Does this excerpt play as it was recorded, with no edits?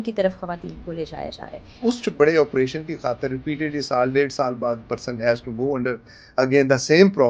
no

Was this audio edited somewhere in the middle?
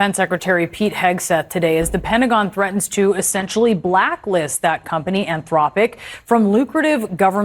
no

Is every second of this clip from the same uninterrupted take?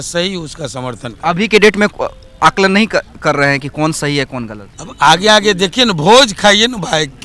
yes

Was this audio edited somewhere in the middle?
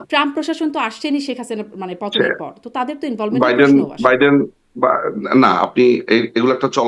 no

